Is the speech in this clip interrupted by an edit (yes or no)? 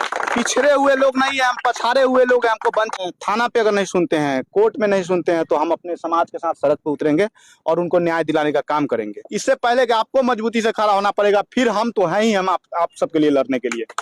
yes